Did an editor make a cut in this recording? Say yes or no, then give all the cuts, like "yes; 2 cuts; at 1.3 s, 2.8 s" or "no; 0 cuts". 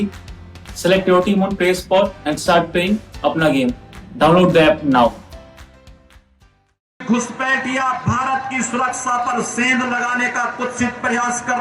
yes; 1 cut; at 7.0 s